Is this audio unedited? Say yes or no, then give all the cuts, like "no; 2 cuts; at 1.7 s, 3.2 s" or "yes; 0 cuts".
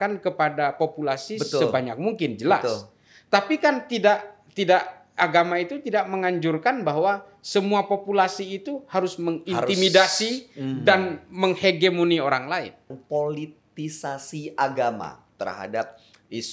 no; 1 cut; at 12.9 s